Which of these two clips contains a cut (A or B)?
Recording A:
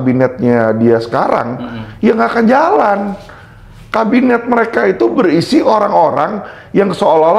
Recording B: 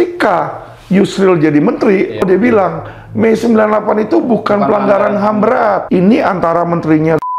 B